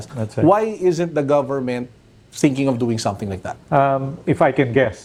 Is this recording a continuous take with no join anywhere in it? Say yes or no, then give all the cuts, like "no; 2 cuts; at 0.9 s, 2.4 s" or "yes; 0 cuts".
yes; 0 cuts